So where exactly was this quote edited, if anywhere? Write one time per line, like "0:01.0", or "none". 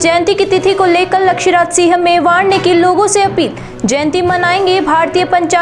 none

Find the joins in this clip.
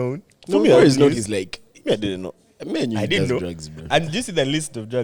none

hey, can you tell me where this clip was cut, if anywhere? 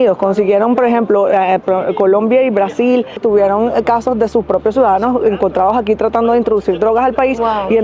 0:03.2

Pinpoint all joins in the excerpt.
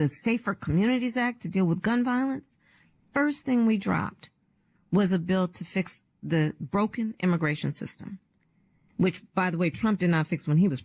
none

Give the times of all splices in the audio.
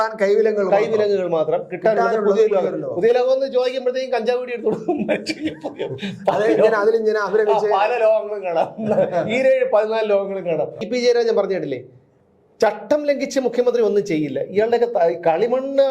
0:10.8

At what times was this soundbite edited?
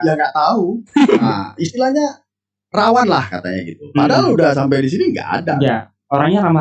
0:01.2

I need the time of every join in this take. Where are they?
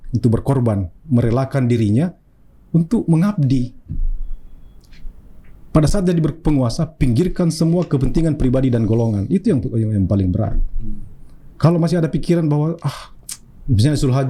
none

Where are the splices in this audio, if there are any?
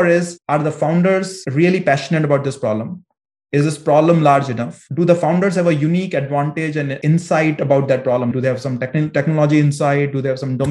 0:06.9

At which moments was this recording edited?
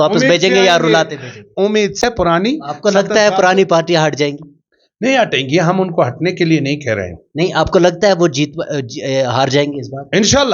0:02.0

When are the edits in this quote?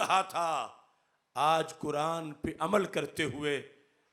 none

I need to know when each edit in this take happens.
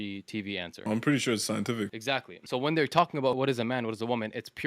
0:03.4

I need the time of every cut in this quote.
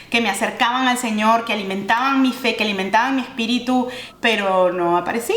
0:04.0

